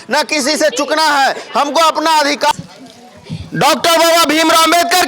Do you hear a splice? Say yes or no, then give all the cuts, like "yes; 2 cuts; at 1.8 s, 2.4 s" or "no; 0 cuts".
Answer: yes; 1 cut; at 2.5 s